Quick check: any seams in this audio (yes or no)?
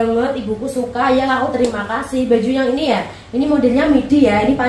no